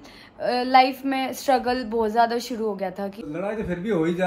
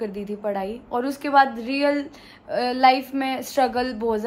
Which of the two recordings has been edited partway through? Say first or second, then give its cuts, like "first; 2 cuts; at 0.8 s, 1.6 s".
first; 1 cut; at 3.2 s